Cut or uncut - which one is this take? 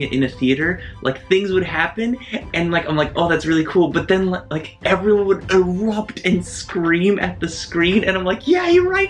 uncut